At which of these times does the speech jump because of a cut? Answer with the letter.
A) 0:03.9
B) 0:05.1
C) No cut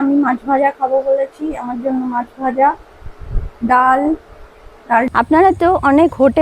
B